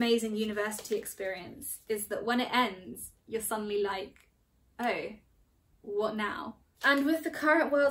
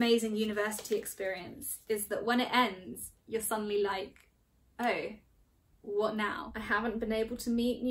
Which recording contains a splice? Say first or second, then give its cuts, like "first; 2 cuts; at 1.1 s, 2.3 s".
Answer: second; 1 cut; at 6.5 s